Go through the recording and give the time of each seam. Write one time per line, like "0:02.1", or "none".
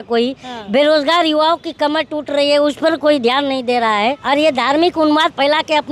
0:04.2